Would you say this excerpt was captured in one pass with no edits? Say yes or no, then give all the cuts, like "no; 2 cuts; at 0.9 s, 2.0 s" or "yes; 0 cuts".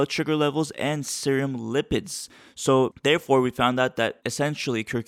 yes; 0 cuts